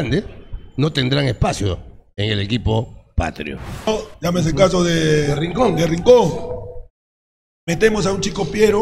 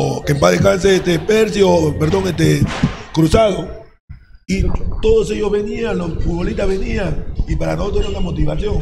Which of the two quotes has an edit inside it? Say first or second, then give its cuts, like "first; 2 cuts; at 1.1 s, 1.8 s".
first; 1 cut; at 3.9 s